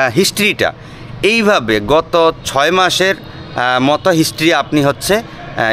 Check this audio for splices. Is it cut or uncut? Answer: uncut